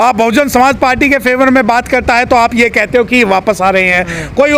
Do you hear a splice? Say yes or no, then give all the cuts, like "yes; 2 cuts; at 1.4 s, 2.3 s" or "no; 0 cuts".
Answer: no; 0 cuts